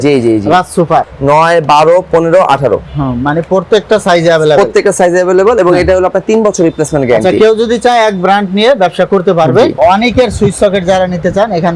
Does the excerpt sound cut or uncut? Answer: cut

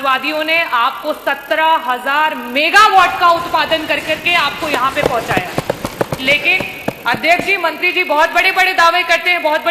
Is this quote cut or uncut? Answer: uncut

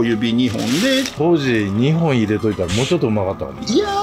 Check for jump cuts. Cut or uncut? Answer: cut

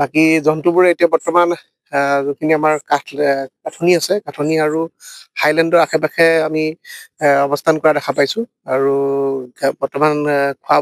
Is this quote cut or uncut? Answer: uncut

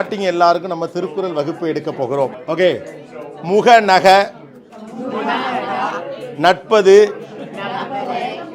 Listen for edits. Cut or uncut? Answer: cut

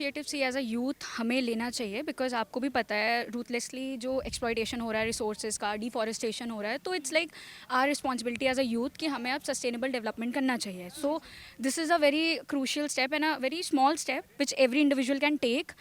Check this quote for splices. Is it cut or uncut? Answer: uncut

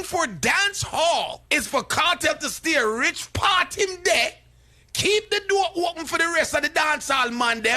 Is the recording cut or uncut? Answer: cut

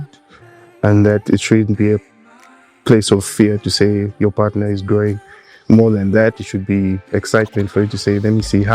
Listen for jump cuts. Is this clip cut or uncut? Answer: uncut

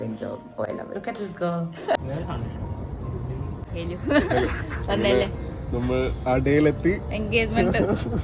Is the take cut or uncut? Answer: cut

